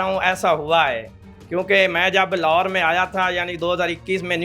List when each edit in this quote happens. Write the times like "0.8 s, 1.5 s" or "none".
none